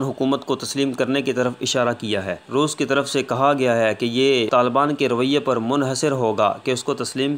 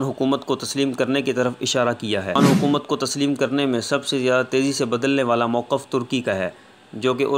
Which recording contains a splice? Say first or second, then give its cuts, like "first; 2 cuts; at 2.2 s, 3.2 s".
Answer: second; 1 cut; at 2.4 s